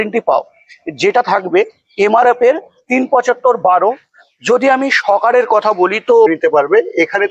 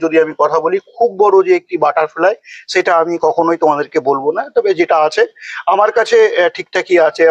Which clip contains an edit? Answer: first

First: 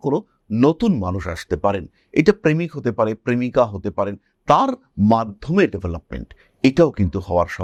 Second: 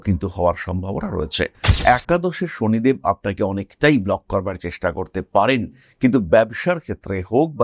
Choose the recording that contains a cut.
second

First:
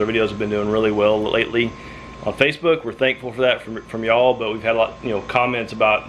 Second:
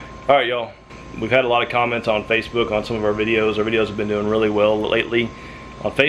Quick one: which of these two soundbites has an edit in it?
second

